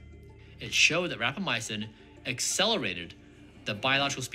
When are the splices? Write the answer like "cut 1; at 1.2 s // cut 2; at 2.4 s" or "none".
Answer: none

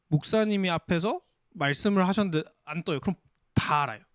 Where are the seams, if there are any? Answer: none

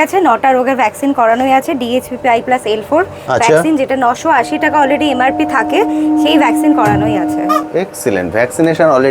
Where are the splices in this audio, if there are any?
none

